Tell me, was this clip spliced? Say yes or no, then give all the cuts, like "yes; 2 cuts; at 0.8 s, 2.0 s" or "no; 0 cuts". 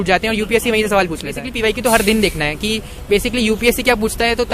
yes; 1 cut; at 1.5 s